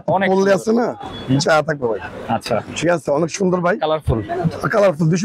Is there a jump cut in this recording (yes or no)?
no